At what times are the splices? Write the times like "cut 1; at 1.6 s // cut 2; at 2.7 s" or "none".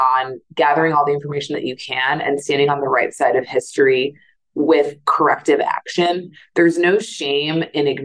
none